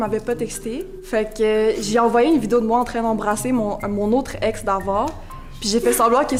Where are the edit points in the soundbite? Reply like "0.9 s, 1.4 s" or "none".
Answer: none